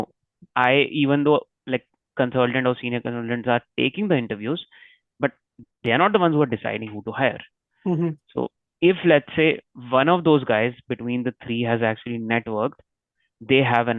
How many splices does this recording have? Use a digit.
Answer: 0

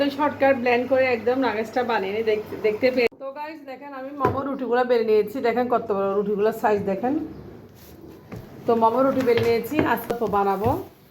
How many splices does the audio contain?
2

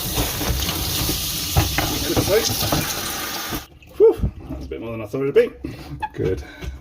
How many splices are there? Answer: 2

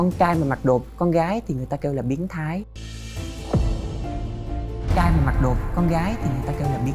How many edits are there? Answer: 0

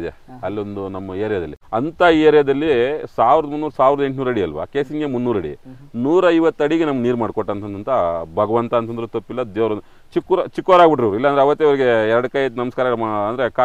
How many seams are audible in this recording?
1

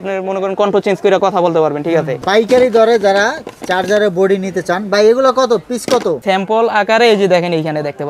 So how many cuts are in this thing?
2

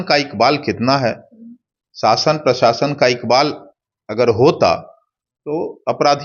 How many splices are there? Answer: 0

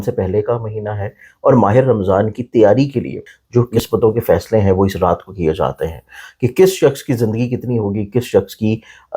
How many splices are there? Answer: 1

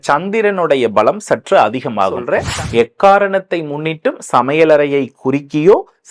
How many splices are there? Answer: 1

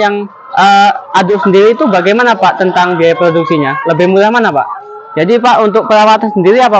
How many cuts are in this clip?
1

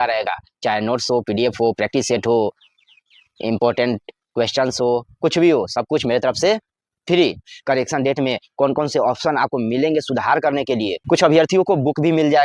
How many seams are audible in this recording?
2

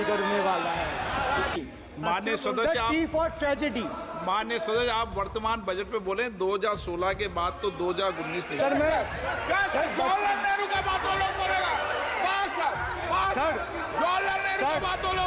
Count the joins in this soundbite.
1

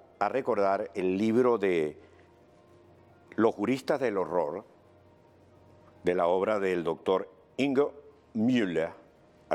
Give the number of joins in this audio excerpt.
1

